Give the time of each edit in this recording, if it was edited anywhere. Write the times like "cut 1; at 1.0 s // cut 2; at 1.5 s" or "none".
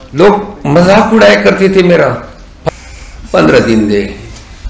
cut 1; at 2.5 s

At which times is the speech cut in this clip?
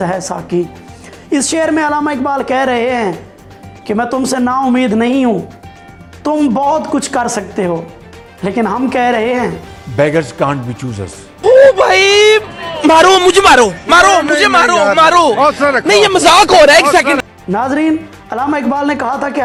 none

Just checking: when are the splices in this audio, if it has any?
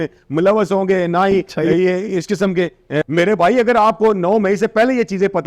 cut 1; at 3.0 s

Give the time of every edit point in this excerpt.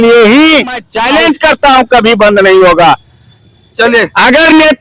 cut 1; at 0.9 s

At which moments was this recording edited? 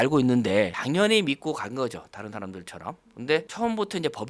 none

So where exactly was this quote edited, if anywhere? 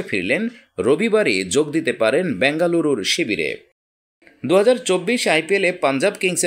cut 1; at 3.7 s

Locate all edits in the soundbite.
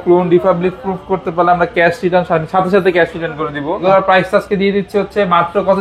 cut 1; at 3.8 s

